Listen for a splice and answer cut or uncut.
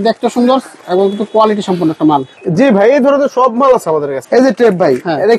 cut